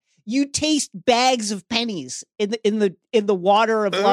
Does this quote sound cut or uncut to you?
uncut